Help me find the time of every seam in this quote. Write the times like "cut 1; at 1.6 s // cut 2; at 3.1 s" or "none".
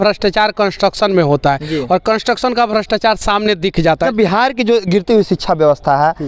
cut 1; at 4.0 s